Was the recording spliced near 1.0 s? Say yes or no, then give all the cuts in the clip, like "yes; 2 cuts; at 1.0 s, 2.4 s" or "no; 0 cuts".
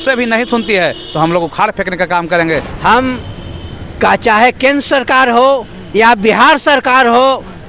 no; 1 cut; at 2.7 s